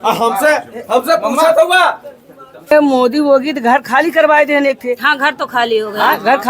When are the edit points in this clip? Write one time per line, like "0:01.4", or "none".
0:02.7